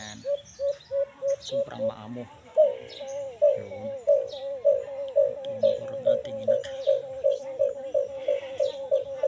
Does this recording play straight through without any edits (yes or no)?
yes